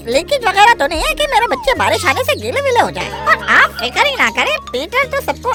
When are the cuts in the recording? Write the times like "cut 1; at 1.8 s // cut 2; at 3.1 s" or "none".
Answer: none